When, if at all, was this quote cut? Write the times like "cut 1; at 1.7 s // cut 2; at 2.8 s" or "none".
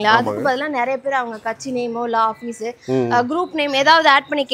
none